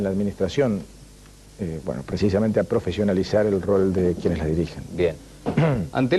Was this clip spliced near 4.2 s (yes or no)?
no